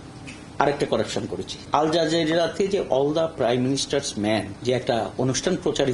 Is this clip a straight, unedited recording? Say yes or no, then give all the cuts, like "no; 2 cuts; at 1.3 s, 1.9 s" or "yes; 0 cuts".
no; 2 cuts; at 1.5 s, 4.5 s